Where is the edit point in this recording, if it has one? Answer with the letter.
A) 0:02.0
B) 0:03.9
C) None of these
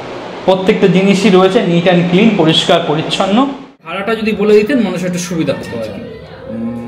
B